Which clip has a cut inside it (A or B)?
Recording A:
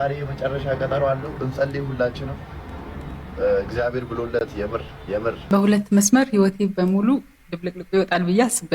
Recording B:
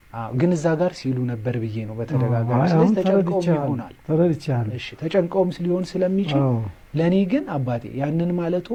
A